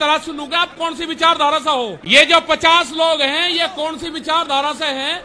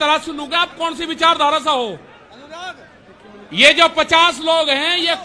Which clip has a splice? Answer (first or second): first